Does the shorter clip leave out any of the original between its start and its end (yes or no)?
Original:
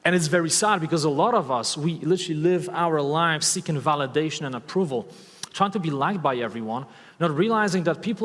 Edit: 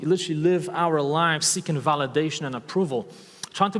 no